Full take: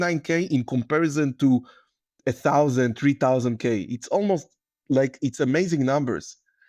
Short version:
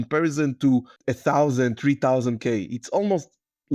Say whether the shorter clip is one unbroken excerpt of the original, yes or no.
no